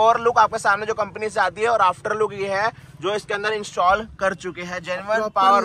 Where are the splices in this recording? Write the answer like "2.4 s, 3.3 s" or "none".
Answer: none